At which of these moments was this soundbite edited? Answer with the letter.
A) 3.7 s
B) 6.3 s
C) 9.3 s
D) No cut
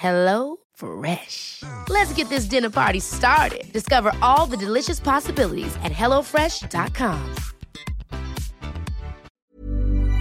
C